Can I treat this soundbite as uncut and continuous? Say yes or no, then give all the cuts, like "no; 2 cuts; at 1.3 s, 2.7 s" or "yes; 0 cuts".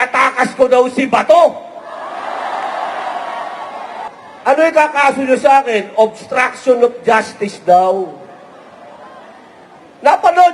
no; 1 cut; at 4.1 s